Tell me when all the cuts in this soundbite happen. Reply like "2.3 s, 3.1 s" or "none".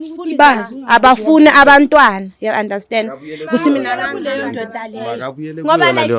none